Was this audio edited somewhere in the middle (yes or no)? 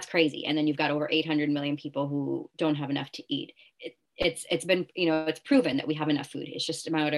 no